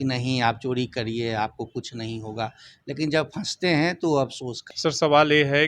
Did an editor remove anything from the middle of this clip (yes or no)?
yes